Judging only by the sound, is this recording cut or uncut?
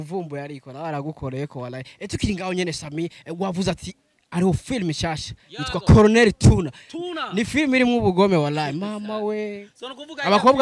uncut